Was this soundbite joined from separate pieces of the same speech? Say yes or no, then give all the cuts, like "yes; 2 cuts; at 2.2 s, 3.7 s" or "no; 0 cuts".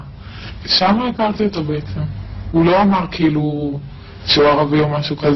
no; 0 cuts